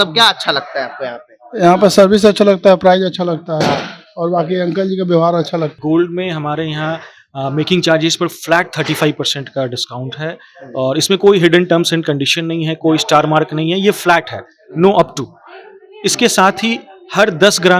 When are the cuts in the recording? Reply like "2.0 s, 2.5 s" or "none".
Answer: 5.7 s